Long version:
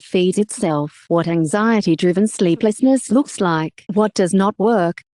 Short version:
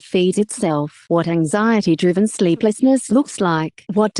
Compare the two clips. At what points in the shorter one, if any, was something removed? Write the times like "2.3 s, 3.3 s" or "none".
none